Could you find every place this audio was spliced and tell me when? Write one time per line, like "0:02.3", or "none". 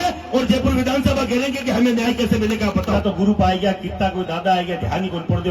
0:02.9